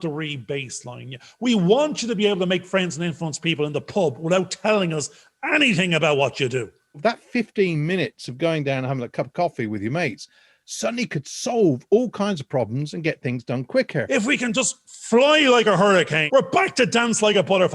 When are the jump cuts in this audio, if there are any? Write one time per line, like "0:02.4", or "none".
0:07.0
0:14.1
0:16.2